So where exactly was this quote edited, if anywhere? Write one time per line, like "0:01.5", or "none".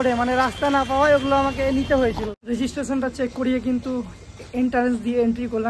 0:02.3